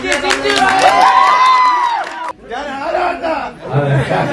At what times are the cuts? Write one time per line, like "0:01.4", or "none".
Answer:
0:02.3